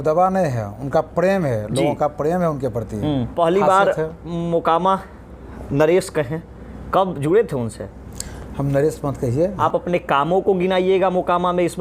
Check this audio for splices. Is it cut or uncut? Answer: cut